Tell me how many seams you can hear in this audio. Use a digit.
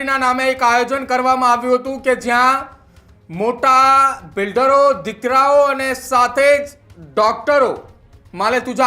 0